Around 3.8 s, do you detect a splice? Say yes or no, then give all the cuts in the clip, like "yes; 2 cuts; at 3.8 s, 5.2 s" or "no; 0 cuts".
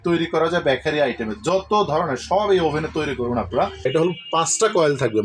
yes; 1 cut; at 3.8 s